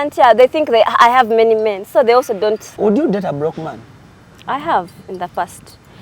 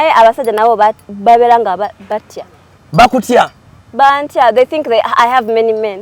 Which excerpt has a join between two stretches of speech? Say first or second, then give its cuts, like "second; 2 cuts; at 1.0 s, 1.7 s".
first; 1 cut; at 2.7 s